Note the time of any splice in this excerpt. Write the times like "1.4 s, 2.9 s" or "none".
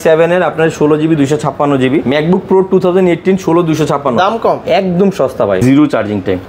2.0 s, 4.6 s, 5.6 s